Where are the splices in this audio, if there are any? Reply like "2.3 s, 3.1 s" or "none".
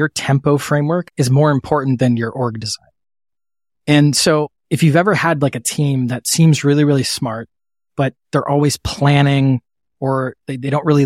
1.1 s